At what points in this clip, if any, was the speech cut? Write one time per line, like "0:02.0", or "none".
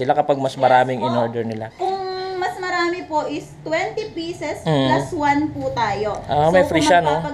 0:01.7